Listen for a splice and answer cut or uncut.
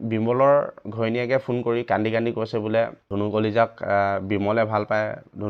cut